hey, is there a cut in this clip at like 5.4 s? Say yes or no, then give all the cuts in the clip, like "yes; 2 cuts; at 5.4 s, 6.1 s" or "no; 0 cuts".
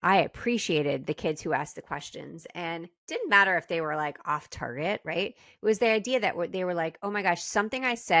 no; 0 cuts